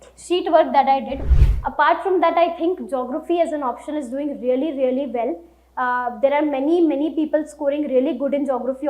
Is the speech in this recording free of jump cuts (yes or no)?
no